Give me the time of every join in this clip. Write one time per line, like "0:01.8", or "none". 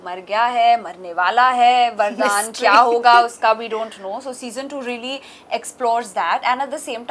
none